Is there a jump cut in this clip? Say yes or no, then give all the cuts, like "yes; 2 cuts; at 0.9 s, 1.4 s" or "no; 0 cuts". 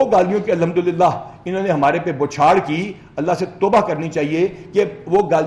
no; 0 cuts